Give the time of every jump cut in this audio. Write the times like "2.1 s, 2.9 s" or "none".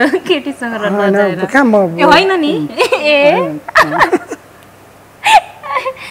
none